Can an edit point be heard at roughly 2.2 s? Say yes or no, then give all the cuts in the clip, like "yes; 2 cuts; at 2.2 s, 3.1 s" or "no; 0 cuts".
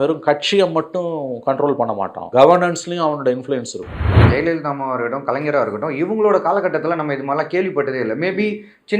yes; 2 cuts; at 2.2 s, 4.2 s